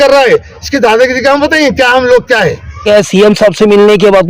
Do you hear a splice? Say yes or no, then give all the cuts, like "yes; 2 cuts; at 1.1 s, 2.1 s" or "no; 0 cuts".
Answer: yes; 1 cut; at 2.8 s